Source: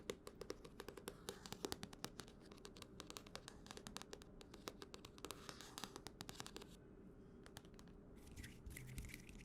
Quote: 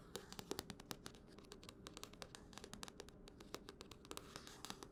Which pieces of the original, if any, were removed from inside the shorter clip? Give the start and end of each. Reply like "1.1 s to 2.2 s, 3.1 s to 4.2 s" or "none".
none